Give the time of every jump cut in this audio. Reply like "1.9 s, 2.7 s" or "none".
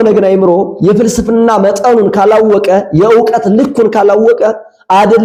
none